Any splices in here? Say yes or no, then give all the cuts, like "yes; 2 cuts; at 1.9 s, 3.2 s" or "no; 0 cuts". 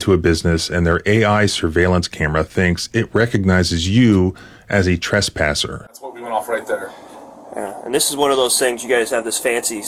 no; 0 cuts